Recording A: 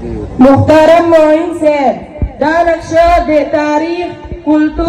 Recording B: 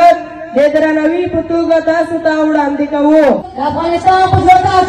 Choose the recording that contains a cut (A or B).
B